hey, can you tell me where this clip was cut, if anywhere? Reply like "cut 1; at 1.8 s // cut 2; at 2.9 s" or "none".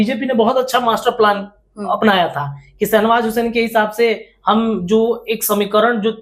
none